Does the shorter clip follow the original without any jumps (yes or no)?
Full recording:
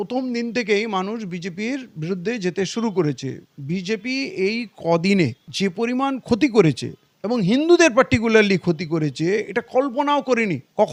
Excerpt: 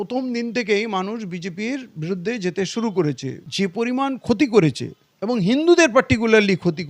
no